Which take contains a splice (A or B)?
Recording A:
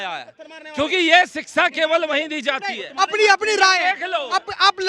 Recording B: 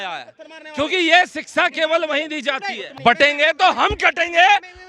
B